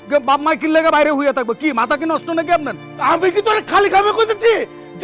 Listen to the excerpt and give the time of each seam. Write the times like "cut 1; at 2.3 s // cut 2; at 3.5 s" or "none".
none